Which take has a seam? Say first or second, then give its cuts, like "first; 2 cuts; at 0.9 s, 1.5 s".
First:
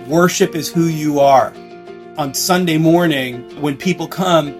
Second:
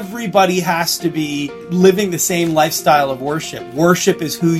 first; 1 cut; at 1.9 s